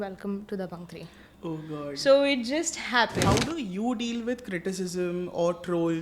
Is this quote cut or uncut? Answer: cut